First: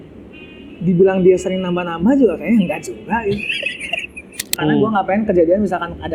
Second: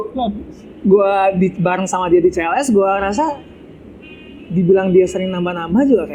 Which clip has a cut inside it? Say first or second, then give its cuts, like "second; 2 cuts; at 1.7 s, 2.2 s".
first; 1 cut; at 4.5 s